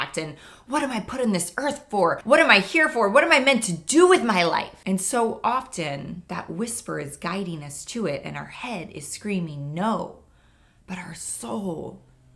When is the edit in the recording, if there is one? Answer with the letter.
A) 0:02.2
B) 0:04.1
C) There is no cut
A